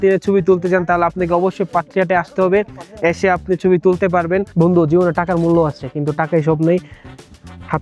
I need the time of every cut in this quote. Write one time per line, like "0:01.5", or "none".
0:04.5